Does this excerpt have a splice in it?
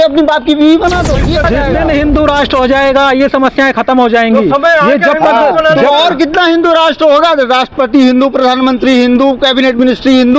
yes; 1 cut; at 1.4 s

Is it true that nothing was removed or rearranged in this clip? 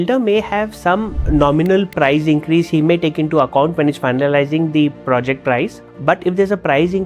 no; 2 cuts; at 1.2 s, 5.8 s

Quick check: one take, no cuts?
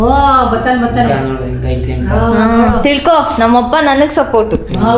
yes; 0 cuts

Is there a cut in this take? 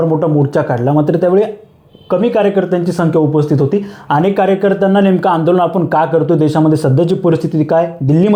no; 0 cuts

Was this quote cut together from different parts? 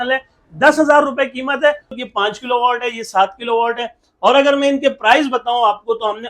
yes; 1 cut; at 1.9 s

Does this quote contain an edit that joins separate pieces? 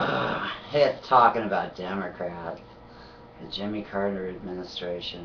yes; 1 cut; at 1.7 s

